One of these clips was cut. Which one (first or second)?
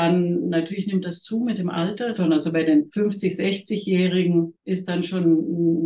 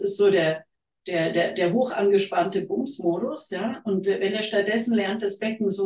first